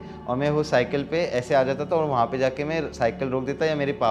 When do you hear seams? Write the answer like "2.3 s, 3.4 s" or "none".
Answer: none

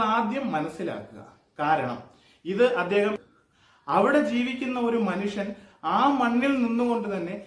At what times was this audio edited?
3.2 s

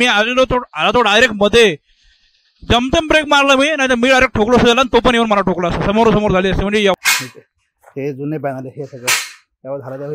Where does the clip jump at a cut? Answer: 7.0 s

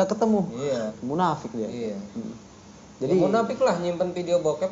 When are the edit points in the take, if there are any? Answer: 1.0 s

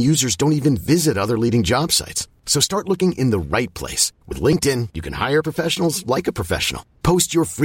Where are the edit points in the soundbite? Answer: none

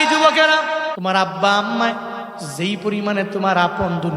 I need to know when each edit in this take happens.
1.0 s

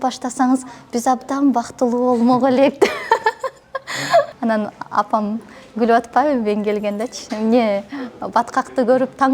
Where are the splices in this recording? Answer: 4.3 s

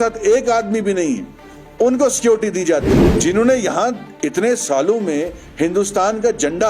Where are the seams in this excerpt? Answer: 3.1 s

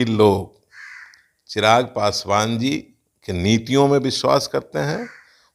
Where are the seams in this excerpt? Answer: none

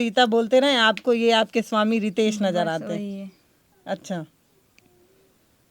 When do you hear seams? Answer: none

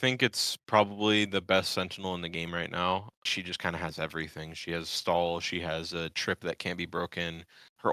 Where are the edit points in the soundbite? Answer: 3.3 s

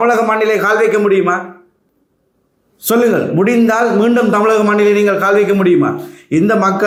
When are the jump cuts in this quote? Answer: none

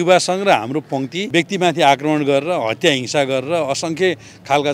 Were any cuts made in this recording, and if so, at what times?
1.3 s

